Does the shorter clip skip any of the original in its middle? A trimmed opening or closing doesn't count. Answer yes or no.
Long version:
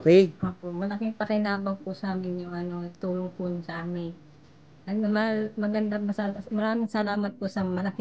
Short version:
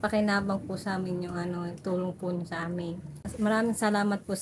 yes